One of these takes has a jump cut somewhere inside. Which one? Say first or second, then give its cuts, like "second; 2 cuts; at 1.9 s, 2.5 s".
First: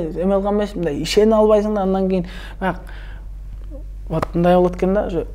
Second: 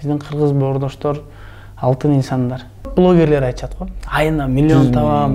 second; 1 cut; at 2.9 s